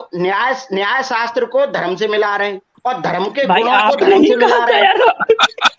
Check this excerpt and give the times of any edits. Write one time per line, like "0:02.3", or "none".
0:02.7